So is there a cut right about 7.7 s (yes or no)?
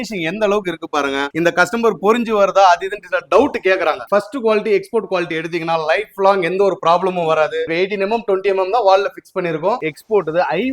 yes